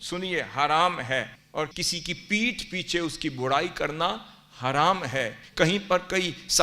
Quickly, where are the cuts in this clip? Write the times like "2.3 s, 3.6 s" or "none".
1.4 s, 5.4 s